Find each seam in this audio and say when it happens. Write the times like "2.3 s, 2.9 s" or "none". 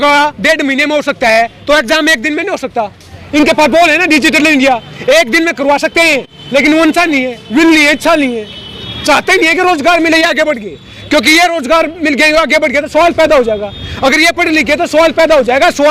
none

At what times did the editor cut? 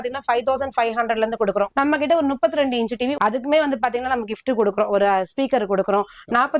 1.7 s, 3.1 s

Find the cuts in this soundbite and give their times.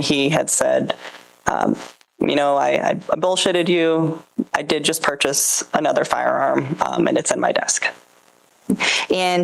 none

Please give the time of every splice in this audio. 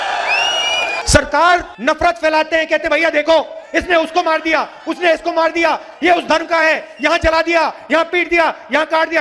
1.0 s, 1.7 s

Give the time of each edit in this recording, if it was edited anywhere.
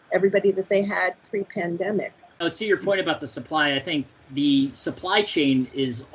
2.4 s, 4.2 s

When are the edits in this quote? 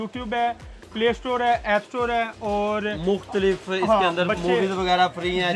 none

